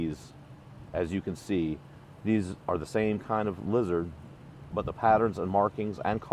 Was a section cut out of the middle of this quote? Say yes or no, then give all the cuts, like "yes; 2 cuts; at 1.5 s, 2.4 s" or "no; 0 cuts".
no; 0 cuts